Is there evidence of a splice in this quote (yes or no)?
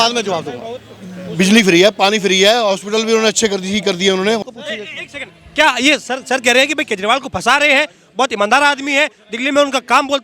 yes